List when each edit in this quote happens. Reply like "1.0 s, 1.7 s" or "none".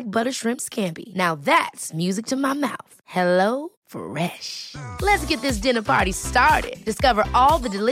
none